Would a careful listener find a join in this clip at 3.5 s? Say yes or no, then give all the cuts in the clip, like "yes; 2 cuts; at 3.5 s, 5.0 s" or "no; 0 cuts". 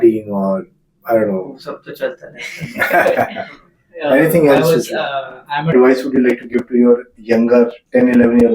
no; 1 cut; at 5.7 s